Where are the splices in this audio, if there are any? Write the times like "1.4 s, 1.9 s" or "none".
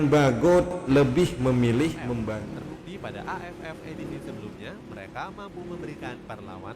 2.4 s